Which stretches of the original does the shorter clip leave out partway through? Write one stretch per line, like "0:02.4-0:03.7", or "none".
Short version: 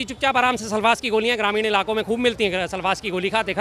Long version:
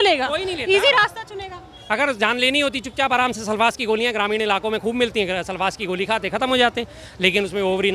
none